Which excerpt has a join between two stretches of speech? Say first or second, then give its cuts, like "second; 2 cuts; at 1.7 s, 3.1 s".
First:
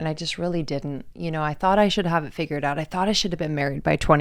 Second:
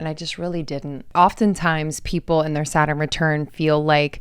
second; 1 cut; at 1.1 s